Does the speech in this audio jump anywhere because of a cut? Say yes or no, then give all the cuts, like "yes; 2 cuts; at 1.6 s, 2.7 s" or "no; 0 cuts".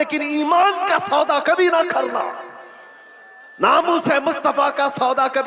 no; 0 cuts